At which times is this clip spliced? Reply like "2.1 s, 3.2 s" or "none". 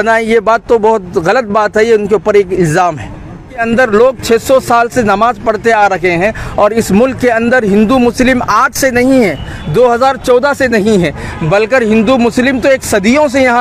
3.6 s